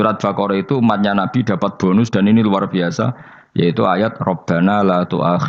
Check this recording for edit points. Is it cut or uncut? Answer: uncut